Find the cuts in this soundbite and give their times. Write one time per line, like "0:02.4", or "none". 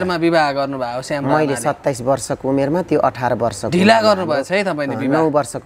none